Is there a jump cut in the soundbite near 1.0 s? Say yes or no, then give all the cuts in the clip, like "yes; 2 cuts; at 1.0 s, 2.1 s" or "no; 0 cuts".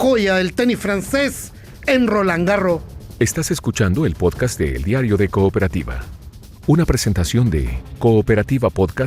no; 1 cut; at 2.9 s